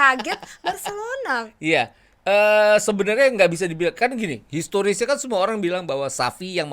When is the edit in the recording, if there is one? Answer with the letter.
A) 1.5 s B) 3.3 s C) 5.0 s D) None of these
D